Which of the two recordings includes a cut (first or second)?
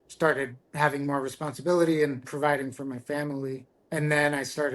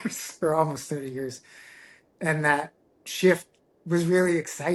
first